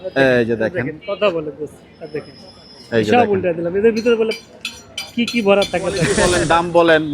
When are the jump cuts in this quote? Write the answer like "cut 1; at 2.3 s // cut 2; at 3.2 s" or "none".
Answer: cut 1; at 6.2 s